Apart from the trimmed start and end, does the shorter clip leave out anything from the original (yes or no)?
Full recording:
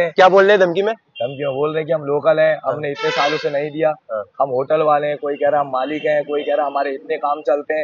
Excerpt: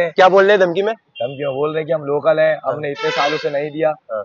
no